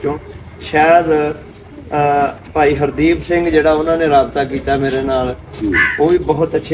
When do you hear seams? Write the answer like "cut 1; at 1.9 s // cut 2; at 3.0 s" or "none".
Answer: none